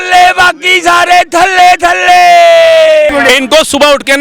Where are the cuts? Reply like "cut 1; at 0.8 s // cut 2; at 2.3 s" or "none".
cut 1; at 3.1 s